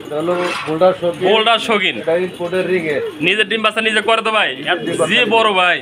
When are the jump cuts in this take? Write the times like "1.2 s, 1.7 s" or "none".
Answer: none